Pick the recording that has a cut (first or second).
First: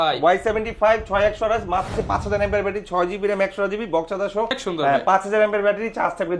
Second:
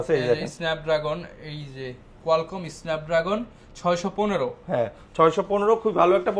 first